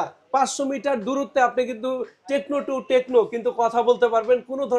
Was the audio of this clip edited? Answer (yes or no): no